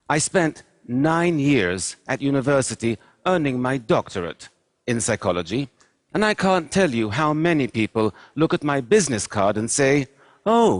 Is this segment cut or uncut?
cut